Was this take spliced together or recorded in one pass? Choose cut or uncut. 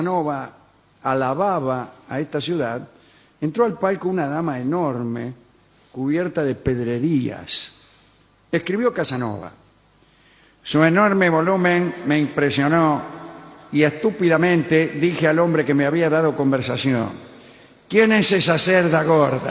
cut